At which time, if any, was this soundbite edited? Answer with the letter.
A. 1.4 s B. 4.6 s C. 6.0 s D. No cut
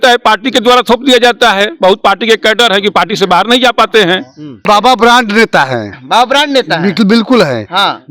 B